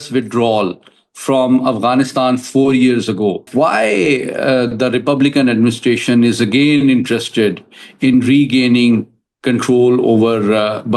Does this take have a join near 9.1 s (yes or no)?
no